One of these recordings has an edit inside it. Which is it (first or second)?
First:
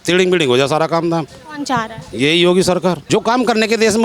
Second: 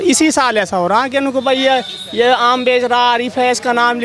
first